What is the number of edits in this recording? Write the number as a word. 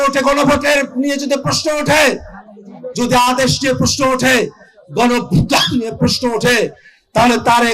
zero